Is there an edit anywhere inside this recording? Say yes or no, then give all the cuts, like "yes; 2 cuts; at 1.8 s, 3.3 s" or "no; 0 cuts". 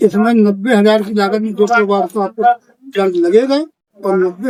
no; 0 cuts